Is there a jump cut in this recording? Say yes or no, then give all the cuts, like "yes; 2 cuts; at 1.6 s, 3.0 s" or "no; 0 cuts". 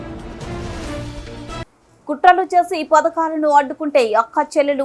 yes; 1 cut; at 1.6 s